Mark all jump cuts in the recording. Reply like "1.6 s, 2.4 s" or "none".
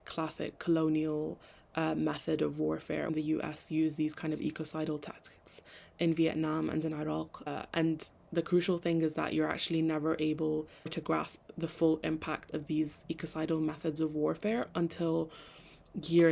8.1 s, 12.5 s